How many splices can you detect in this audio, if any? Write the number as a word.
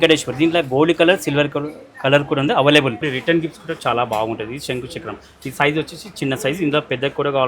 one